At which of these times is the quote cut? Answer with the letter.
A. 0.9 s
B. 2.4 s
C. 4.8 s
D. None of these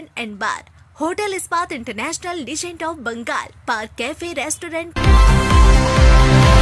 C